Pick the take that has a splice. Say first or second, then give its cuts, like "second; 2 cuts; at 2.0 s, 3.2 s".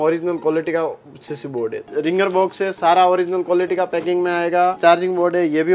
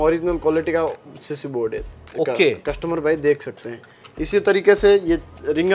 first; 2 cuts; at 1.8 s, 4.8 s